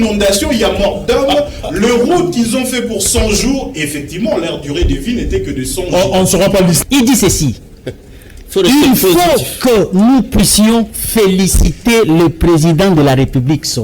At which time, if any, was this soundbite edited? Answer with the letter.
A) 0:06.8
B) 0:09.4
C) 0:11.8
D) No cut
A